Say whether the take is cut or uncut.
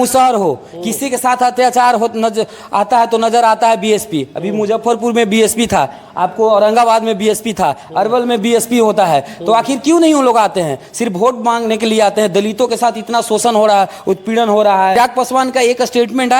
cut